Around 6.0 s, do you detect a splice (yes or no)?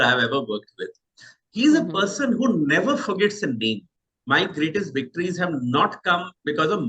no